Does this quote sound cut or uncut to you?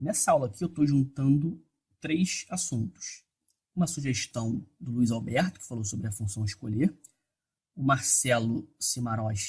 cut